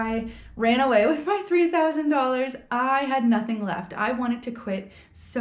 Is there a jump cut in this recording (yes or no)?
no